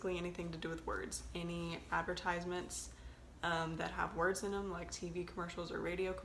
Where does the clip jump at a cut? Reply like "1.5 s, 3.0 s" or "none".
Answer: none